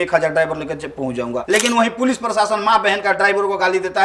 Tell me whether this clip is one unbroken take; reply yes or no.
no